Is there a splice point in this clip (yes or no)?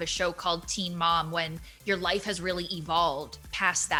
no